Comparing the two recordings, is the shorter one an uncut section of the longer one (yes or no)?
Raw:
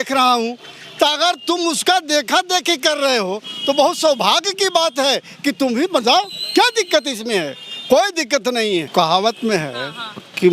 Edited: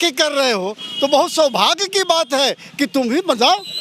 yes